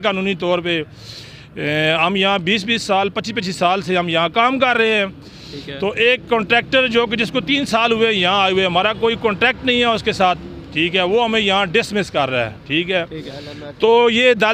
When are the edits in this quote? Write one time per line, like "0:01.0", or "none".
none